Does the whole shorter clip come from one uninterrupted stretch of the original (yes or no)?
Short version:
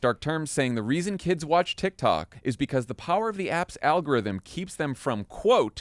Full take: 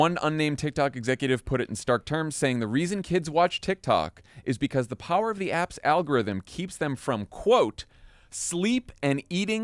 no